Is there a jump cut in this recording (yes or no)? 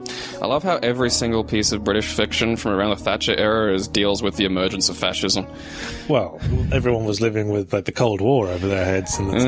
no